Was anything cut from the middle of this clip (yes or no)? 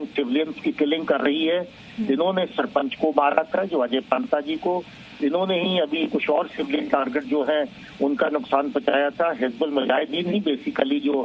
yes